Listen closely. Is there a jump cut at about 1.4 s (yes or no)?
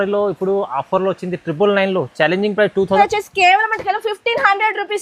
no